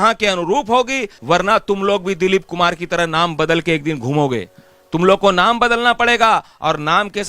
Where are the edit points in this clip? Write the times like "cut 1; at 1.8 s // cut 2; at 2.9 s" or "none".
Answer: cut 1; at 1.1 s

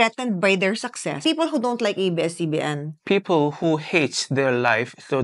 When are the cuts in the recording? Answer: cut 1; at 1.2 s // cut 2; at 2.9 s

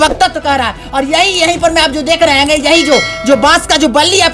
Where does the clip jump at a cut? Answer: none

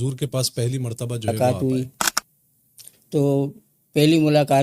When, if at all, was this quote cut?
cut 1; at 1.3 s

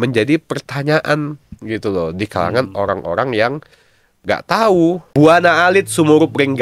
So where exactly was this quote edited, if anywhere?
cut 1; at 5.0 s

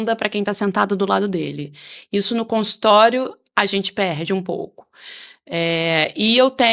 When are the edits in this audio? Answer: none

